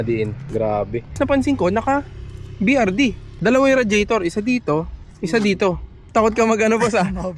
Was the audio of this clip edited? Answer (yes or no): yes